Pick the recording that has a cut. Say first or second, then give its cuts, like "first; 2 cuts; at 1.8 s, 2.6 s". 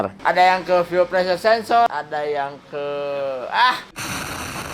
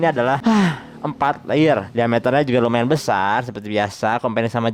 first; 1 cut; at 1.9 s